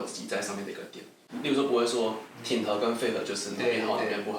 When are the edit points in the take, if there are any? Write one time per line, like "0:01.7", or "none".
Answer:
0:01.2